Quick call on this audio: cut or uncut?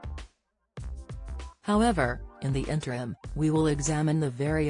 cut